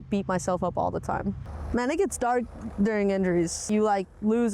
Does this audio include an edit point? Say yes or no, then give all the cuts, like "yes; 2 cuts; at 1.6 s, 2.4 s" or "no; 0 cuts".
yes; 2 cuts; at 1.4 s, 3.6 s